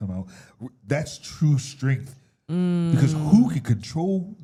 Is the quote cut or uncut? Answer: uncut